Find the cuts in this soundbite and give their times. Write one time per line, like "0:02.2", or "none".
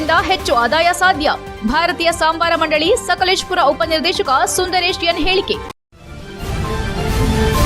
0:05.7

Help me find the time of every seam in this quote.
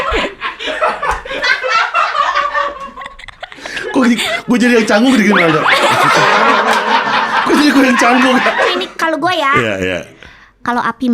0:08.7

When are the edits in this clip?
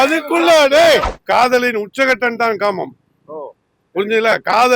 0:01.1

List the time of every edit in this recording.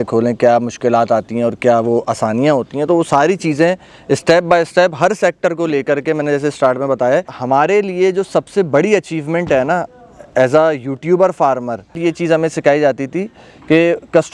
0:07.3
0:12.0

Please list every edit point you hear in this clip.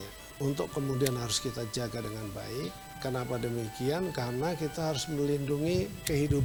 none

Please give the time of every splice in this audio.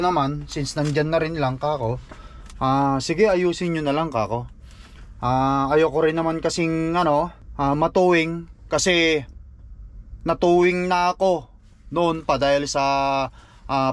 0:07.4

